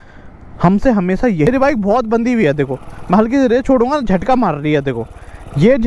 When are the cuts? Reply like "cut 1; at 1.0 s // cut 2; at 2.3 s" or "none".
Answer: cut 1; at 1.5 s

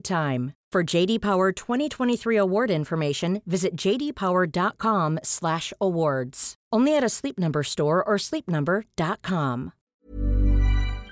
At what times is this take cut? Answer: cut 1; at 9.8 s

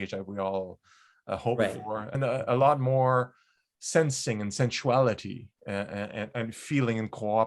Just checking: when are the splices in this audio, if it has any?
cut 1; at 2.1 s

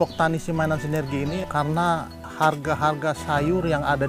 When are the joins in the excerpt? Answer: cut 1; at 1.4 s

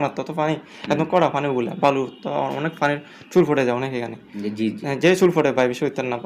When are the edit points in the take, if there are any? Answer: none

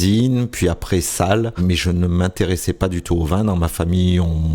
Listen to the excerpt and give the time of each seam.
cut 1; at 1.6 s

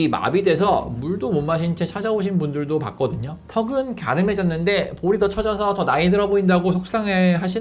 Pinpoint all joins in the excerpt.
cut 1; at 3.4 s

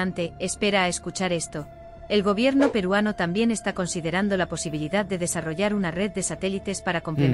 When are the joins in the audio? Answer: cut 1; at 2.3 s

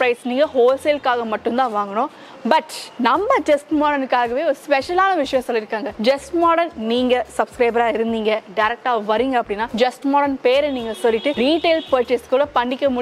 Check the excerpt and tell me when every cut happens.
cut 1; at 2.8 s // cut 2; at 5.8 s // cut 3; at 9.7 s // cut 4; at 11.3 s

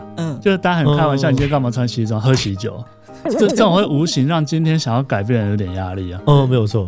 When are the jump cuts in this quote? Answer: none

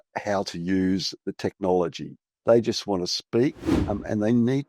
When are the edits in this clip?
cut 1; at 1.2 s // cut 2; at 3.7 s

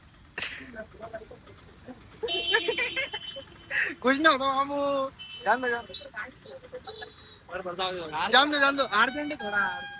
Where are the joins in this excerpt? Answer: none

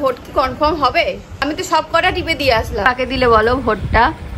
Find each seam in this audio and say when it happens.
cut 1; at 1.4 s // cut 2; at 2.9 s

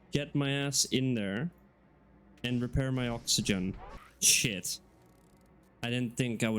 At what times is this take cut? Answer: none

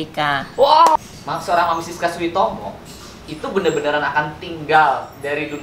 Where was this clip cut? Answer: cut 1; at 1.0 s

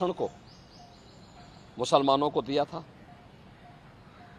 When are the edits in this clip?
none

